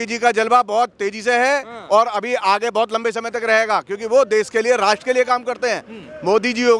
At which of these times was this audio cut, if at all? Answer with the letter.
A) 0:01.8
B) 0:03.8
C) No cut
C